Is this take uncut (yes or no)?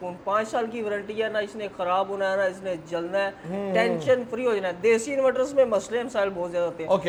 yes